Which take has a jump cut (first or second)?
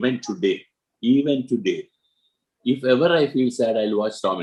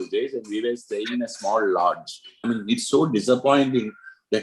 second